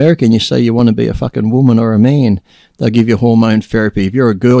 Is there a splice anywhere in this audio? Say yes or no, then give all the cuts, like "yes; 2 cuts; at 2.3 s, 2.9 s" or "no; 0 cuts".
no; 0 cuts